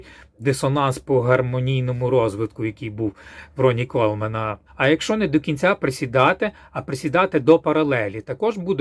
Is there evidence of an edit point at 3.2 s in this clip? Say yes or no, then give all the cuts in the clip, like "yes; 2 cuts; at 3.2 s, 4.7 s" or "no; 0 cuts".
no; 1 cut; at 4.6 s